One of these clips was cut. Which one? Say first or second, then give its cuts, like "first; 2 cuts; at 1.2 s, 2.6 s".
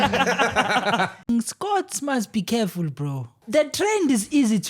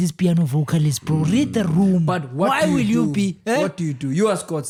first; 2 cuts; at 1.3 s, 3.4 s